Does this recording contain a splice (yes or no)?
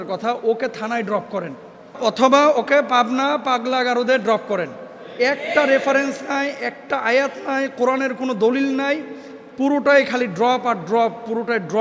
yes